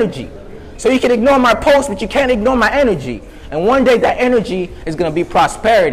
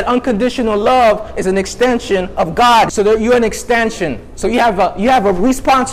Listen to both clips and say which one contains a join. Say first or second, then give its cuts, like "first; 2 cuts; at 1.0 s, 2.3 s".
second; 1 cut; at 2.6 s